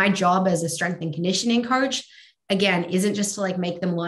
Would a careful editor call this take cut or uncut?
uncut